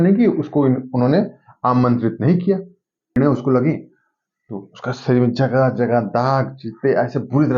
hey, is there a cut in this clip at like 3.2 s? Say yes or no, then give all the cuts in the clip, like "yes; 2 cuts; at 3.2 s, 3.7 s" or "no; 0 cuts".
yes; 1 cut; at 3.2 s